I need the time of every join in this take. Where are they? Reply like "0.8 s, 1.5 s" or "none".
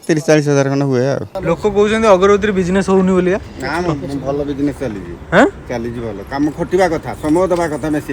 1.3 s